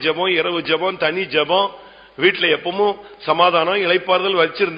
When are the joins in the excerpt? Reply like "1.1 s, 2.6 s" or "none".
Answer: none